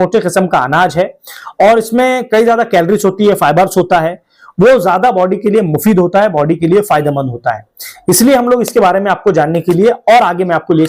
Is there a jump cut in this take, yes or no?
no